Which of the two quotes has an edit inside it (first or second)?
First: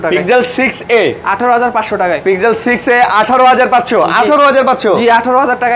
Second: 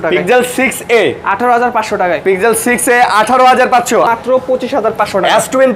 second